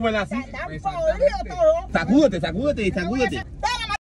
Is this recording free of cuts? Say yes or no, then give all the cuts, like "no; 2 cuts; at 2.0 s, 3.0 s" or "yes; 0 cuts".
yes; 0 cuts